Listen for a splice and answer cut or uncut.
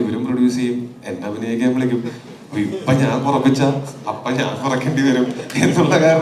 uncut